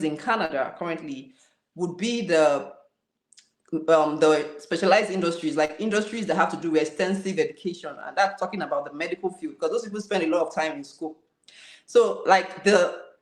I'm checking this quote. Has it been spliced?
no; 0 cuts

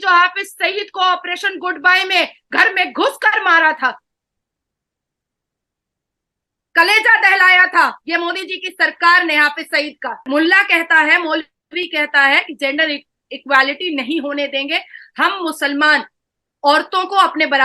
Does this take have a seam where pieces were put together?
yes; 1 cut; at 10.2 s

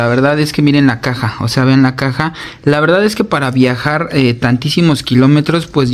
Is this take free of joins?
yes; 0 cuts

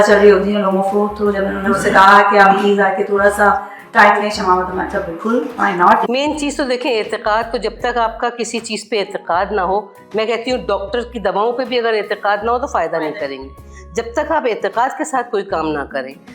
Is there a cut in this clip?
yes; 1 cut; at 6.1 s

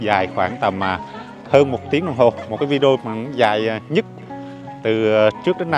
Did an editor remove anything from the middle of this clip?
no; 0 cuts

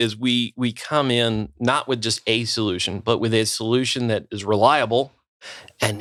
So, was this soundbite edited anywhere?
no; 0 cuts

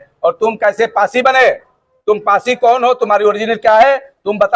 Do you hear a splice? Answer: no; 0 cuts

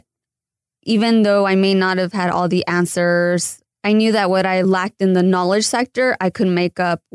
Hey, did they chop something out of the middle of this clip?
yes; 2 cuts; at 3.6 s, 4.6 s

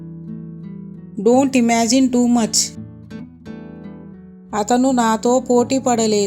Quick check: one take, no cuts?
yes; 0 cuts

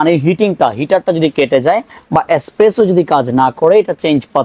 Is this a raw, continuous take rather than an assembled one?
yes; 0 cuts

